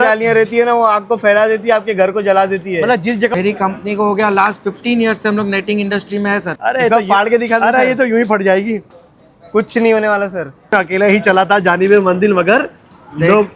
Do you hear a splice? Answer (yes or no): yes